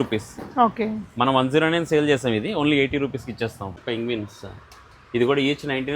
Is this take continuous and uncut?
no; 1 cut; at 3.8 s

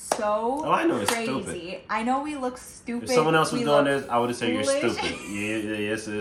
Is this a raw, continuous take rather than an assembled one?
yes; 0 cuts

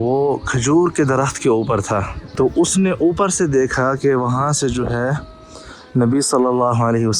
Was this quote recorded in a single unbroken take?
no; 1 cut; at 2.2 s

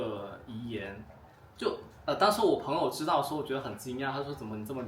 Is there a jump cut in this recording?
no; 0 cuts

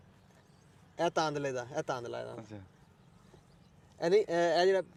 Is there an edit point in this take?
no; 0 cuts

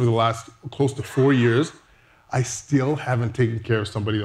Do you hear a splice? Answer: no; 0 cuts

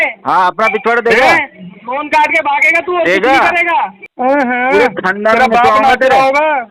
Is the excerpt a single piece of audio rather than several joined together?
no; 1 cut; at 4.0 s

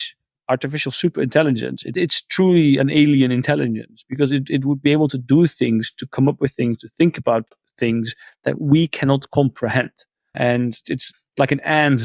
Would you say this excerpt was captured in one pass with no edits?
yes; 0 cuts

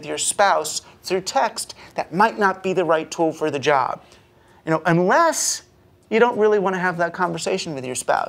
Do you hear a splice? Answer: no; 0 cuts

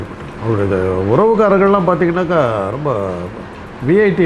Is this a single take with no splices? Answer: yes; 0 cuts

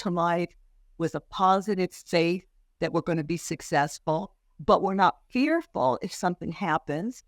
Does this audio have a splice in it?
no; 0 cuts

